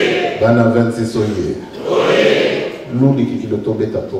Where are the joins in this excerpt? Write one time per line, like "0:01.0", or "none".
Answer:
none

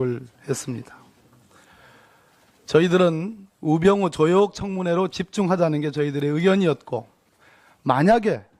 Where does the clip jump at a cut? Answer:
0:03.1

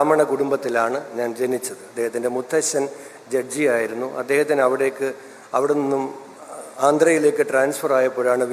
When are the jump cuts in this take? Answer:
none

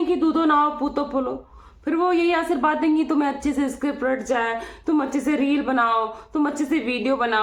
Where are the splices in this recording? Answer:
none

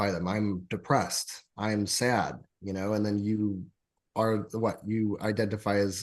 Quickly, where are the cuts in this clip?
none

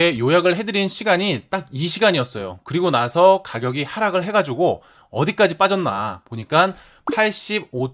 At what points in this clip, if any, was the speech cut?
none

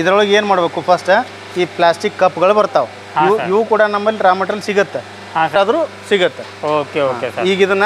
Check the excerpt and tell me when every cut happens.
0:05.5

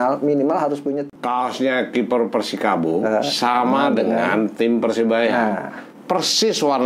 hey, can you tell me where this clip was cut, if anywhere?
0:01.0

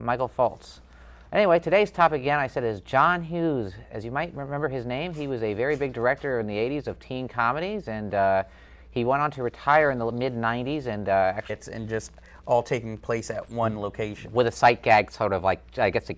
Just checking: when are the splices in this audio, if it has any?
none

